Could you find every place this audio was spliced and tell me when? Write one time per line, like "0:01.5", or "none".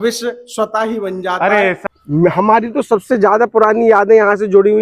0:01.8